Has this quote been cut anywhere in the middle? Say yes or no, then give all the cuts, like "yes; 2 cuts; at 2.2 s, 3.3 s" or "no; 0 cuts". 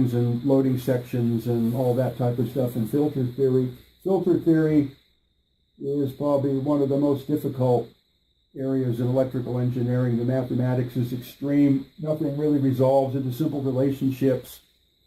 no; 0 cuts